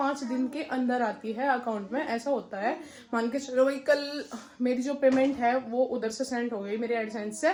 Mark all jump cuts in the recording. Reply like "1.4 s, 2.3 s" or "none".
none